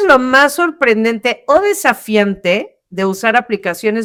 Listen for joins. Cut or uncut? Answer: uncut